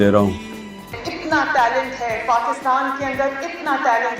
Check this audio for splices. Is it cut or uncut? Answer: cut